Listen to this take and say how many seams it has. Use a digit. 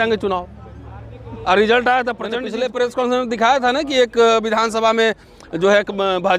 1